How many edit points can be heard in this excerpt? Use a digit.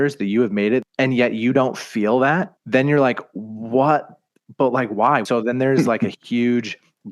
3